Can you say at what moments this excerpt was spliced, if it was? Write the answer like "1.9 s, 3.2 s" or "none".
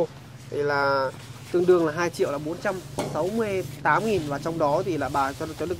none